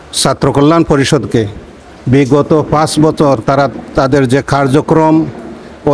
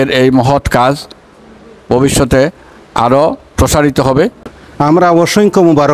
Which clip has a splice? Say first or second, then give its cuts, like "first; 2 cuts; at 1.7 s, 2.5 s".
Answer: second; 1 cut; at 4.3 s